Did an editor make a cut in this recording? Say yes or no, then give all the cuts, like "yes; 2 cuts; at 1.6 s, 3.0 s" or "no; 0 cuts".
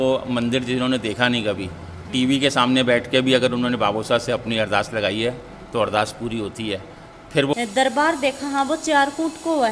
yes; 1 cut; at 7.5 s